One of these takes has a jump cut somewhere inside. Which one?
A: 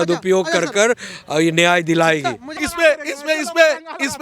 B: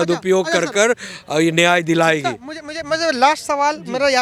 A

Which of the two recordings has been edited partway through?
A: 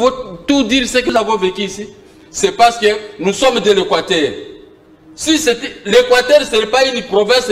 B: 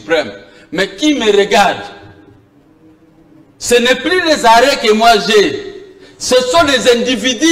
A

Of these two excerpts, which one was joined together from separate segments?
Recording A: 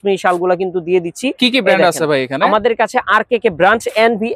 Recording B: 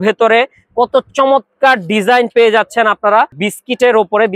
B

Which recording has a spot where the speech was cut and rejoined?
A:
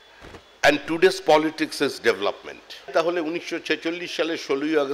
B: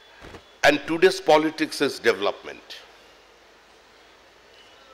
A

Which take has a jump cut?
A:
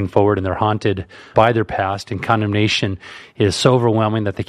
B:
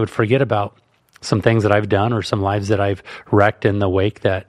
A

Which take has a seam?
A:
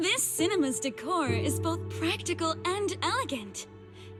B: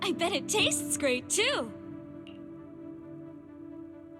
B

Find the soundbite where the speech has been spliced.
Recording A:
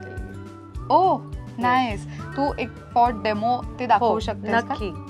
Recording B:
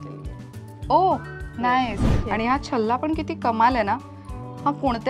B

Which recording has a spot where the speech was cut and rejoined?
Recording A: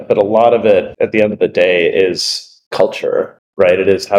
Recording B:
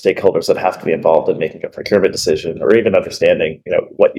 A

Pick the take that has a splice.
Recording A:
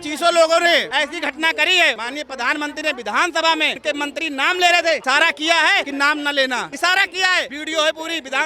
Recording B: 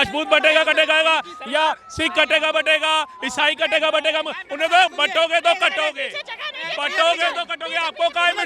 A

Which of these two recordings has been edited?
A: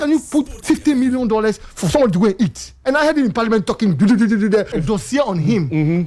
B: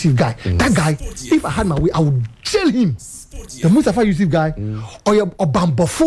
A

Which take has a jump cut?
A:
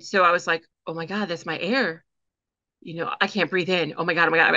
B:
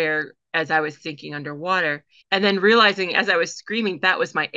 B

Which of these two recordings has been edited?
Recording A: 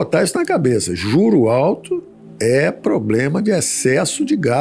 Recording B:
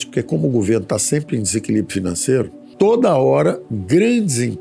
B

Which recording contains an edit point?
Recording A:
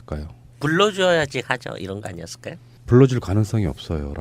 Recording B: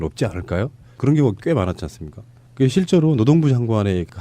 B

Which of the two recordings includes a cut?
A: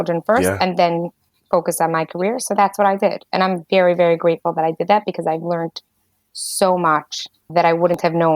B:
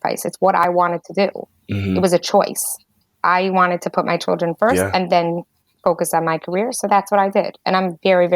A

